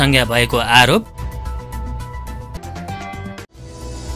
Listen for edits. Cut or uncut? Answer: uncut